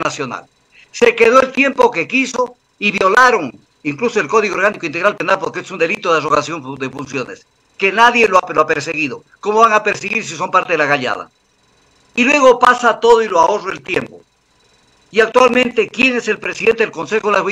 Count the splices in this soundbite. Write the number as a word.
zero